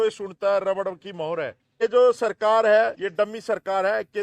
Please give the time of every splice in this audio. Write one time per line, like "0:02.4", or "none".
0:01.8
0:03.0